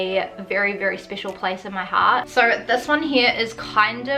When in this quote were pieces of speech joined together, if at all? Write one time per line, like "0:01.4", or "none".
0:02.3

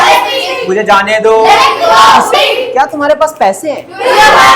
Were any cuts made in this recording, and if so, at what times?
0:02.3

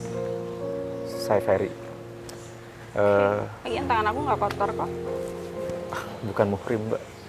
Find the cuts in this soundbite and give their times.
0:01.3
0:04.8
0:06.0

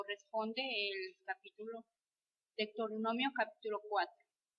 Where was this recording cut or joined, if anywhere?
none

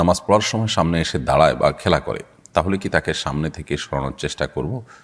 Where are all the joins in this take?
none

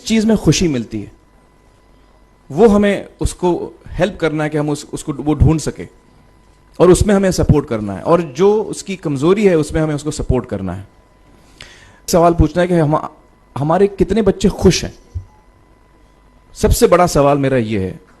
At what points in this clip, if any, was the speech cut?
0:12.1

